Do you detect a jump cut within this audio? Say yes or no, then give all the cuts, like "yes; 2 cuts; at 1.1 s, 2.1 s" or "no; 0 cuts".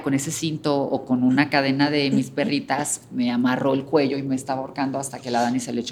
no; 0 cuts